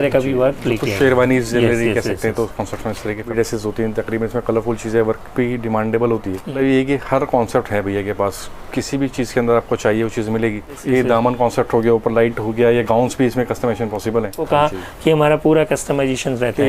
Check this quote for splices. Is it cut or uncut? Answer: cut